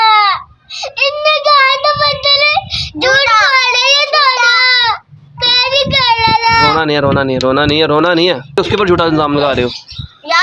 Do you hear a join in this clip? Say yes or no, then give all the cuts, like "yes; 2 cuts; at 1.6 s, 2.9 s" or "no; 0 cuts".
yes; 2 cuts; at 4.4 s, 8.5 s